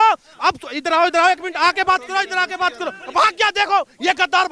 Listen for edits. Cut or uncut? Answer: uncut